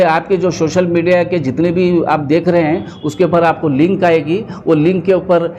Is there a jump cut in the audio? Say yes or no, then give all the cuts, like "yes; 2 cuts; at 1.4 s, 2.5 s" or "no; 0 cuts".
no; 0 cuts